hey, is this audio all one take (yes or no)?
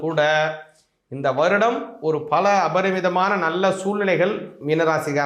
yes